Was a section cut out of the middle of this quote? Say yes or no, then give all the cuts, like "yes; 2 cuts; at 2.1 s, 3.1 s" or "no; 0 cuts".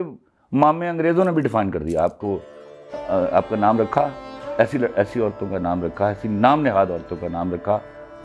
no; 0 cuts